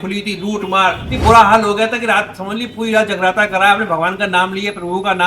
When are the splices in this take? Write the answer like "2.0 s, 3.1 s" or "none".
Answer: 1.1 s